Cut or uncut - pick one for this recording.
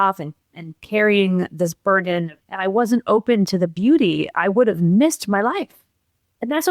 cut